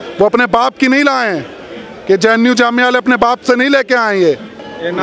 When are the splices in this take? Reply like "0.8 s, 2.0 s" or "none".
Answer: none